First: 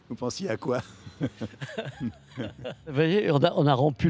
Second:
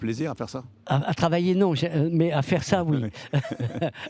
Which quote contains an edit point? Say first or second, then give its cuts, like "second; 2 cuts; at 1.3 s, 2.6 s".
first; 1 cut; at 2.9 s